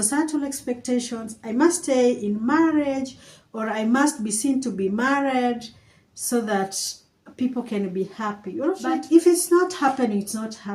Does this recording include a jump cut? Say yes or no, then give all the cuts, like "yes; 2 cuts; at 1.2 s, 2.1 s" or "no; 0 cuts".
yes; 1 cut; at 8.8 s